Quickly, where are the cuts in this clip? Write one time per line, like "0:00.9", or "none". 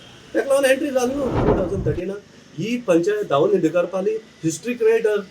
0:01.4